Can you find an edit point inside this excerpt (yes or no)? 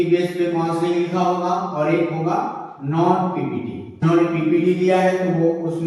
yes